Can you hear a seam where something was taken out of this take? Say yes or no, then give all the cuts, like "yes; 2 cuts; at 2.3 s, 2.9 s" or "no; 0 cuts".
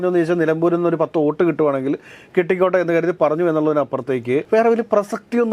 yes; 1 cut; at 4.4 s